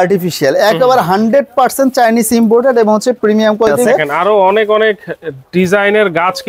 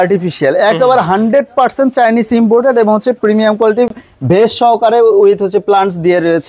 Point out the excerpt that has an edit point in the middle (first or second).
first